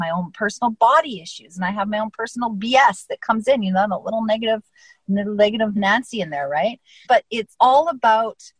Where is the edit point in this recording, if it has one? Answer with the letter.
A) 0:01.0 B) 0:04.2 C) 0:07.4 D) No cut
D